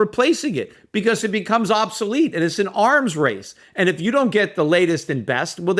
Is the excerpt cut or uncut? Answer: uncut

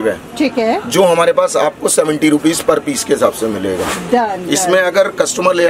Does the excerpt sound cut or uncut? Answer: uncut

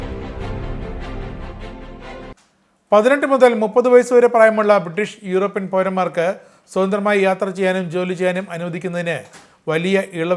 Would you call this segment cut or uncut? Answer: cut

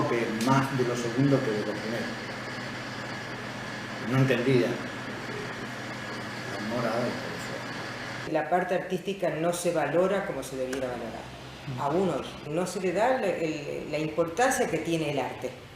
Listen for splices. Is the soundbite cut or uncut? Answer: cut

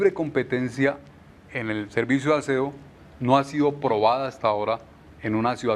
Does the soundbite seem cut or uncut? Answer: uncut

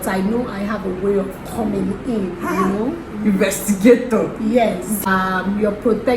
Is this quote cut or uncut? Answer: cut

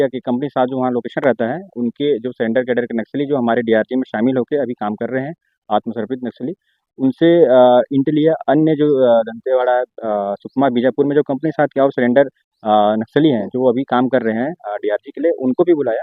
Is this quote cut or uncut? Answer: uncut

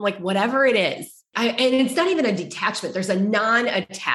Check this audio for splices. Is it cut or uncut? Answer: cut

